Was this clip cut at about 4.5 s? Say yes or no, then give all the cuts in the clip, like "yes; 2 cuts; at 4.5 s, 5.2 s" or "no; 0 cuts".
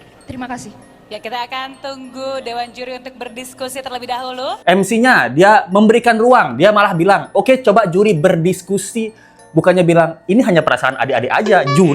yes; 1 cut; at 4.5 s